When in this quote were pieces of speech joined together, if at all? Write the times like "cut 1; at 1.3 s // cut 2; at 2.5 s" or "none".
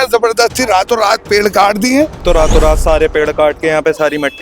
cut 1; at 2.2 s